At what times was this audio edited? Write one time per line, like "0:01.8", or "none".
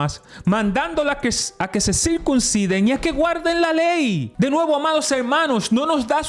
0:04.3